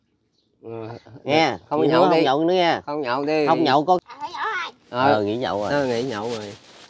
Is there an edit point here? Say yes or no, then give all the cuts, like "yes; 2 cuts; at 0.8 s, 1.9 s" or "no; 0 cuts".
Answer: yes; 1 cut; at 4.0 s